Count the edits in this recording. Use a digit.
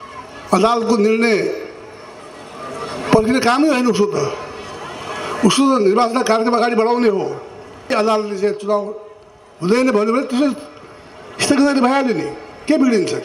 1